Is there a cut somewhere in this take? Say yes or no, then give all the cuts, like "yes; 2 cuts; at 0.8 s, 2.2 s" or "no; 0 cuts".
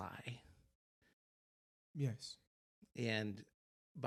no; 0 cuts